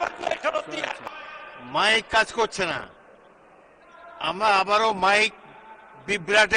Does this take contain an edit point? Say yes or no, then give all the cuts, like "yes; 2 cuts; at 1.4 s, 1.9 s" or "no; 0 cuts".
yes; 1 cut; at 1.1 s